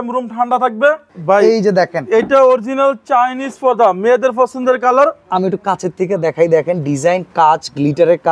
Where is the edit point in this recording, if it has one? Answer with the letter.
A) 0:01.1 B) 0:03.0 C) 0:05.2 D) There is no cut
A